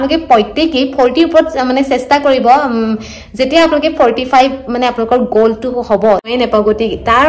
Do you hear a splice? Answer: yes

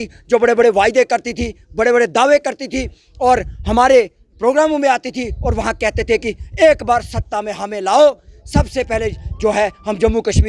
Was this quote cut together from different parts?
no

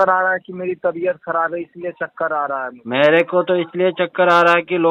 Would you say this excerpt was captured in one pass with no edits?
yes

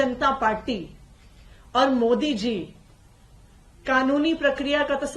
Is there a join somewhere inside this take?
no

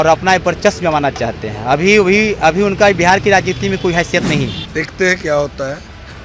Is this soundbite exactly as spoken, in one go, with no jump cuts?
no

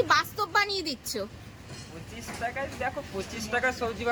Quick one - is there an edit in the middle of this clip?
no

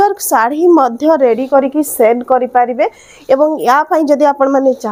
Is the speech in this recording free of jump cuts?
yes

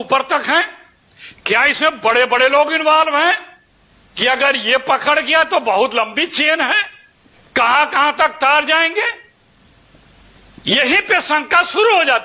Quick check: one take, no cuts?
yes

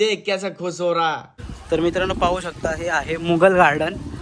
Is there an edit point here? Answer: yes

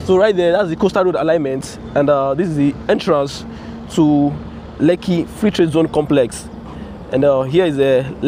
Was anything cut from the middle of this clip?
no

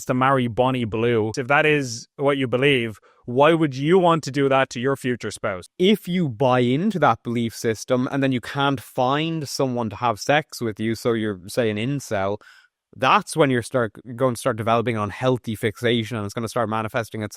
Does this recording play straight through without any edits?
no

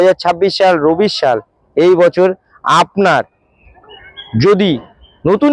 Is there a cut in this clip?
no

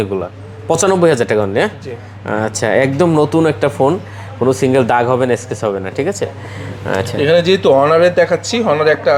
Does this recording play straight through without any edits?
yes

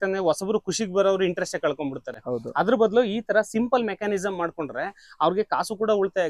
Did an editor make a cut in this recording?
no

